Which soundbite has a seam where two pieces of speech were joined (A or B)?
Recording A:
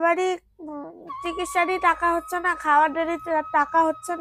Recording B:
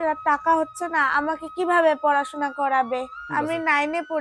B